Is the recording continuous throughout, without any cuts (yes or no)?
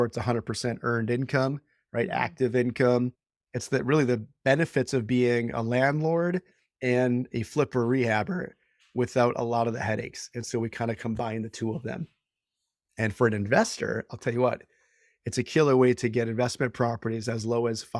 yes